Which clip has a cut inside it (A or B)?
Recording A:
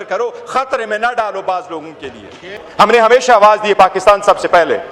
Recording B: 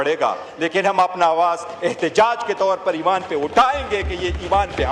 A